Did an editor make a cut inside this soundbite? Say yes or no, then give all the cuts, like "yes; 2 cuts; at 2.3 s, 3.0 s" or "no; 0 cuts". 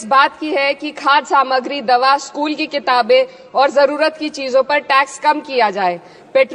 no; 0 cuts